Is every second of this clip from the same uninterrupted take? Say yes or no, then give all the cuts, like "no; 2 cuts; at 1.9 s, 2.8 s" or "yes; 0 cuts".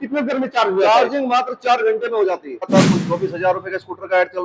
no; 1 cut; at 2.6 s